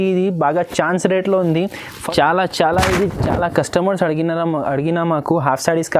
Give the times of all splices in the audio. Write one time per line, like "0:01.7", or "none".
0:02.0